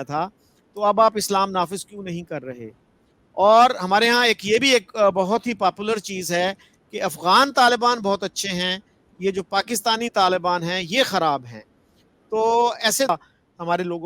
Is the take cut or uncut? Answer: cut